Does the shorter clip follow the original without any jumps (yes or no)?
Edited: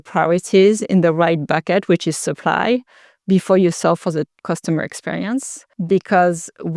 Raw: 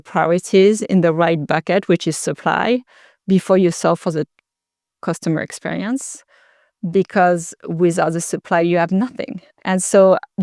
no